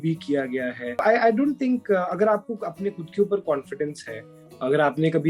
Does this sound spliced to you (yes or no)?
yes